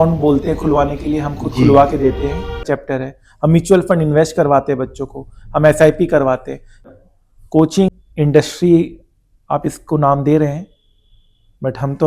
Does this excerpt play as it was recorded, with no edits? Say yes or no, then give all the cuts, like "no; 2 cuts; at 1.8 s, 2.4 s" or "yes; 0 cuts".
no; 3 cuts; at 2.7 s, 6.9 s, 7.9 s